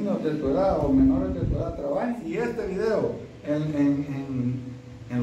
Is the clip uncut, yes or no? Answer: no